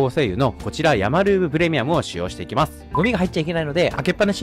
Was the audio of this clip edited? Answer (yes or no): yes